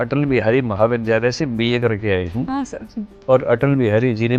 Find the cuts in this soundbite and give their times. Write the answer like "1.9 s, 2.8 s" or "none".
none